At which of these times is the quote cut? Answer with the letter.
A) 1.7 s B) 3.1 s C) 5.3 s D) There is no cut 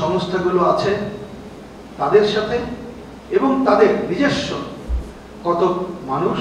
D